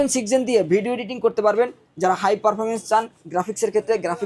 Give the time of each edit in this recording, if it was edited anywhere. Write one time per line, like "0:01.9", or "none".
none